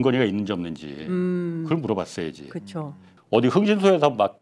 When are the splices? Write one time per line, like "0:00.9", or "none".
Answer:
0:03.1